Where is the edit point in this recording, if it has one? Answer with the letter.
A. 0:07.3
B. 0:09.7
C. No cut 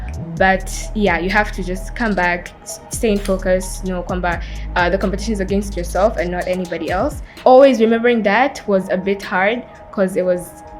A